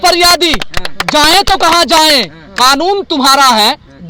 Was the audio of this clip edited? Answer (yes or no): no